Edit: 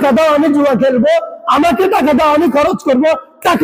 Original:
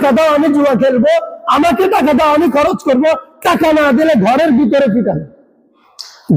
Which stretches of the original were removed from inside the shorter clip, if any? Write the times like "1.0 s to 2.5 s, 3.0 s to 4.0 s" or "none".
none